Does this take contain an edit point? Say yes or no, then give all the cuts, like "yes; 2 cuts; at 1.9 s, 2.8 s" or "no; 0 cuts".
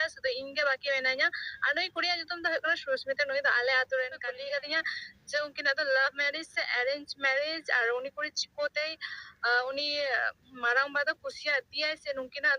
yes; 1 cut; at 4.3 s